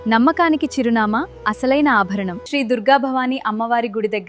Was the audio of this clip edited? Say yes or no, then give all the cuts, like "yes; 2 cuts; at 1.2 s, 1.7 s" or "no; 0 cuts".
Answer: yes; 1 cut; at 2.4 s